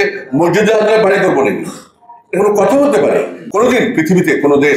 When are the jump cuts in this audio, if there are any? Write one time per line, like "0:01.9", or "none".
0:03.4